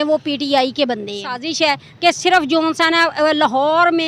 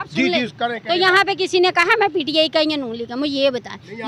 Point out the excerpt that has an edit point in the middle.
first; 1 cut; at 1.3 s

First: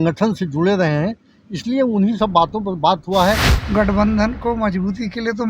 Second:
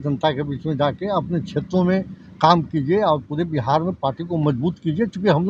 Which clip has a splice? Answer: first; 1 cut; at 3.5 s

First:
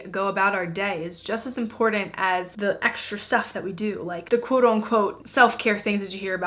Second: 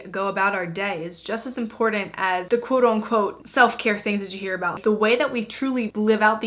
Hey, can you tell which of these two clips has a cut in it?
second; 2 cuts; at 2.5 s, 4.8 s

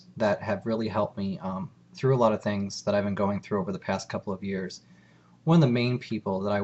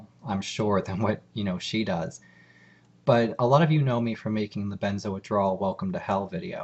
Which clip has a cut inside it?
second; 1 cut; at 1.9 s

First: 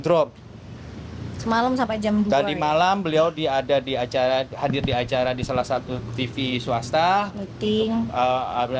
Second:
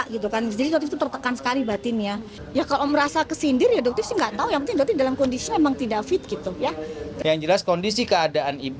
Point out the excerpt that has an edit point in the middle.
second; 2 cuts; at 2.4 s, 7.0 s

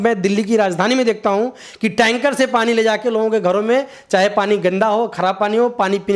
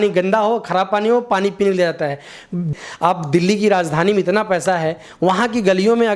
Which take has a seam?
second; 1 cut; at 2.7 s

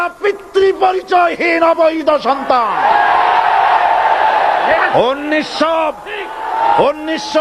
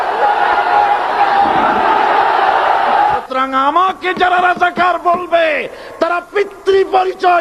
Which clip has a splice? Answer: second; 1 cut; at 3.0 s

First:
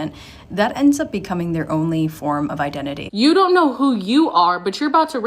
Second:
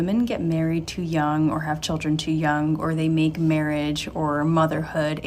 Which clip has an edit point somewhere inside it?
first; 1 cut; at 3.0 s

